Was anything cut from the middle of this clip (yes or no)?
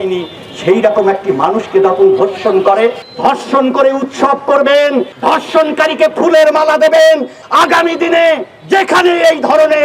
yes